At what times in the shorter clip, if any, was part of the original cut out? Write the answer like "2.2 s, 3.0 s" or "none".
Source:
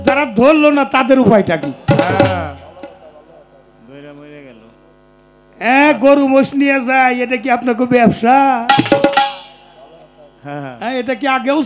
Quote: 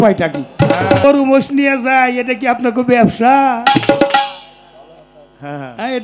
1.0 s

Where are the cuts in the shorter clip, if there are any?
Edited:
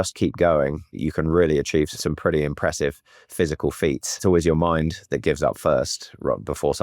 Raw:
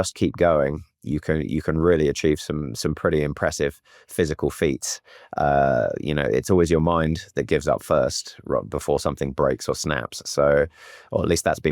1.0 s, 1.9 s, 4.2 s

